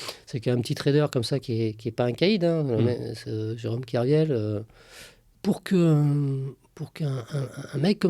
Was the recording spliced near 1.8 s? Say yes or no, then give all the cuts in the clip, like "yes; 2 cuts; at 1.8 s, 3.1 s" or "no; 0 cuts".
no; 1 cut; at 5.3 s